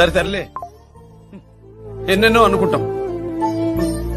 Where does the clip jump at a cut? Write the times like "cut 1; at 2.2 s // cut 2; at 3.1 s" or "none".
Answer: none